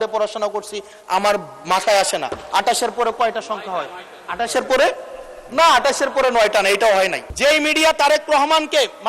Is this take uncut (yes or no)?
no